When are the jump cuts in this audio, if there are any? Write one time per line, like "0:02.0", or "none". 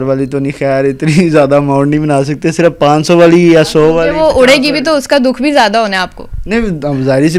none